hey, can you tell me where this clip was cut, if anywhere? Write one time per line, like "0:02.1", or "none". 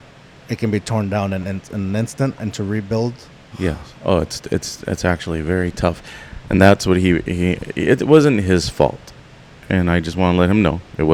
none